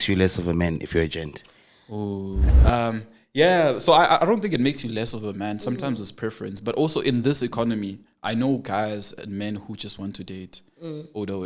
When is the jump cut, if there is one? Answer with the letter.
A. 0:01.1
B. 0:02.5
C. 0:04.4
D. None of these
B